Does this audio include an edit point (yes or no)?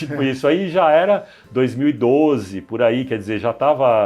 no